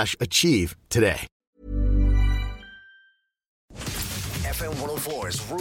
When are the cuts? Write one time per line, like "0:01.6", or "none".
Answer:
0:03.8